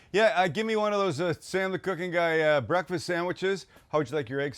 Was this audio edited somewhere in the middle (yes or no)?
no